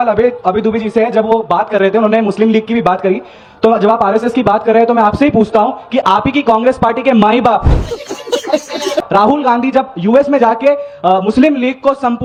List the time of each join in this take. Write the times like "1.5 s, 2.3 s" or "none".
none